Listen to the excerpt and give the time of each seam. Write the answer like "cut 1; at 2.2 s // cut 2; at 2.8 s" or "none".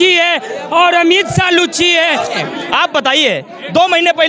cut 1; at 2.4 s

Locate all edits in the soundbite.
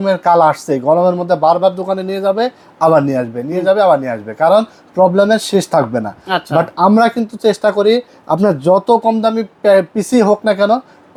none

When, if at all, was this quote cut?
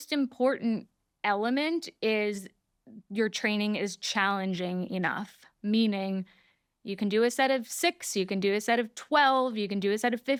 none

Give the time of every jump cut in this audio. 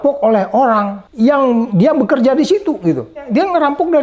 cut 1; at 1.0 s // cut 2; at 1.7 s // cut 3; at 3.3 s

